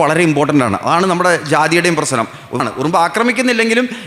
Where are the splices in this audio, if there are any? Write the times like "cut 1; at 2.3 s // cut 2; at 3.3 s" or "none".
cut 1; at 2.6 s